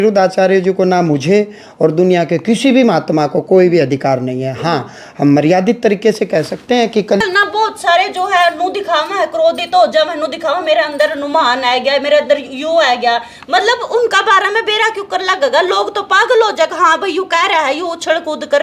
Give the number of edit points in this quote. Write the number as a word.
one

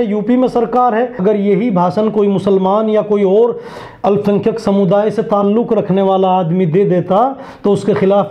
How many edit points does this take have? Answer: one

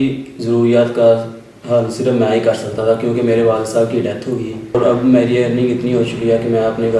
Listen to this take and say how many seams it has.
one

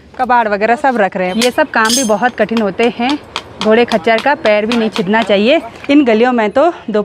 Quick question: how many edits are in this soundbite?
two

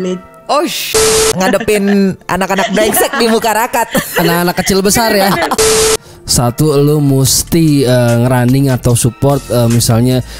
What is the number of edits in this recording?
two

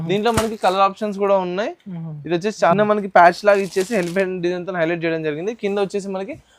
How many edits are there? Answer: one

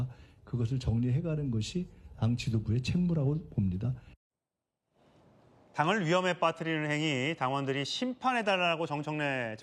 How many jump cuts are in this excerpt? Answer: zero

